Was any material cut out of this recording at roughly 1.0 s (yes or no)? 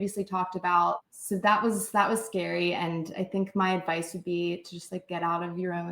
yes